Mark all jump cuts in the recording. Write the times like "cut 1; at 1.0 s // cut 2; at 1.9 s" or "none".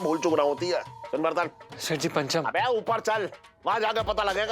cut 1; at 1.0 s